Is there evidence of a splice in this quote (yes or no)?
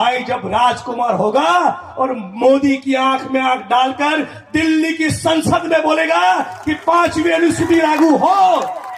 no